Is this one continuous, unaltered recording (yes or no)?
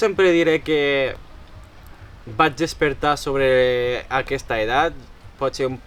yes